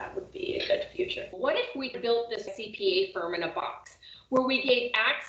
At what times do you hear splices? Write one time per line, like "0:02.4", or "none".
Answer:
0:01.3
0:02.5